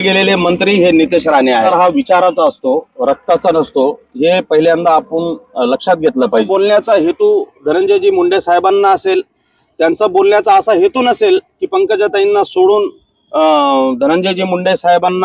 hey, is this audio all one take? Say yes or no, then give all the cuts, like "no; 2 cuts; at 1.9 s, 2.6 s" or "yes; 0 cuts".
no; 2 cuts; at 1.7 s, 6.5 s